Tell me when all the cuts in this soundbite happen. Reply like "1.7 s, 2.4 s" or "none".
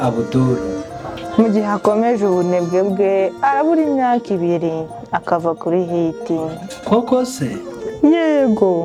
none